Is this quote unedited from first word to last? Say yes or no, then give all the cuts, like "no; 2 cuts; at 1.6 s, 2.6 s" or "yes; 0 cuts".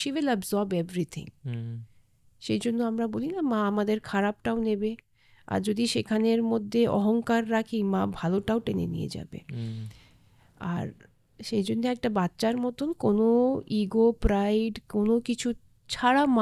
yes; 0 cuts